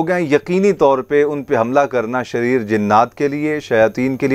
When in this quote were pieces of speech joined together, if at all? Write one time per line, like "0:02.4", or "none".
none